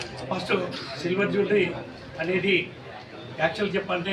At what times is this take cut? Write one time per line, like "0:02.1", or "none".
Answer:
none